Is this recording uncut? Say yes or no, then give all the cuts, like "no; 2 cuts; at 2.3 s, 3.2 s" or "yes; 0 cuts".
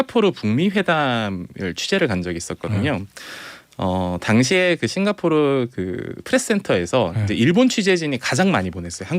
yes; 0 cuts